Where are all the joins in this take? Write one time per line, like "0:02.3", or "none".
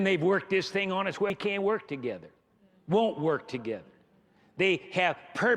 0:01.3